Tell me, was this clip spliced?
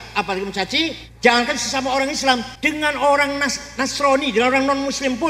yes; 2 cuts; at 1.0 s, 2.5 s

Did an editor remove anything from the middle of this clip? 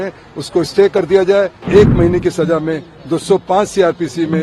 yes; 1 cut; at 1.6 s

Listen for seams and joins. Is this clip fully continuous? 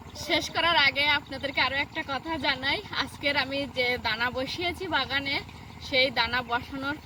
yes; 0 cuts

